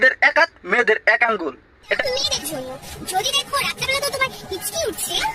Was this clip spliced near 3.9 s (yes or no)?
no